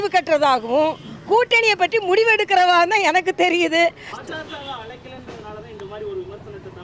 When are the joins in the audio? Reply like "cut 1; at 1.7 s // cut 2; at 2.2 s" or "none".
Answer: cut 1; at 4.1 s